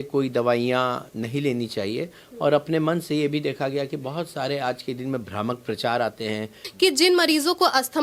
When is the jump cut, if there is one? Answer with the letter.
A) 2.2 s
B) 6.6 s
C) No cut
B